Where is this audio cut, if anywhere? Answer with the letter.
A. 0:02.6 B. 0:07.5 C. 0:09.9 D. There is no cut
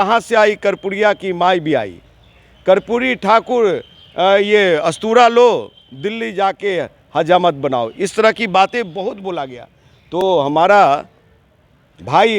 D